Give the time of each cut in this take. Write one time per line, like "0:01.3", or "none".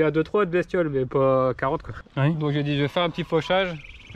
0:02.0